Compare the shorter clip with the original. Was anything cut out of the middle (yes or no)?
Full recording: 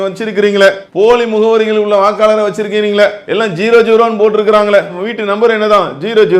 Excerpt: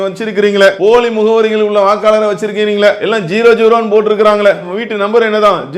yes